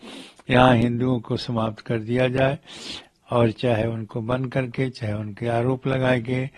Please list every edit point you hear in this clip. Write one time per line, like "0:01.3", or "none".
none